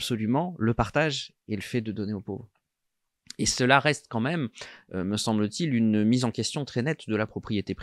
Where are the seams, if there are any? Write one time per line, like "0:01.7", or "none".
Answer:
none